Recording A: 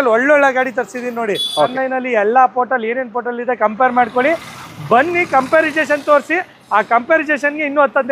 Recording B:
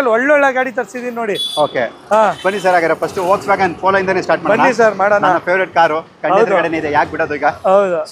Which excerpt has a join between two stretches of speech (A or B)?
A